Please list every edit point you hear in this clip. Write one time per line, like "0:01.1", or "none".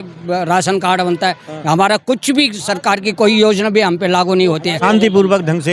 0:04.8